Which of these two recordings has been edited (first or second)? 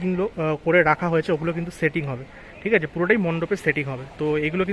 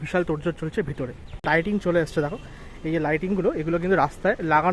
second